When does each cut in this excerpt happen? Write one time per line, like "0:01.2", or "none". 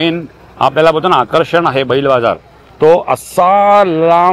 none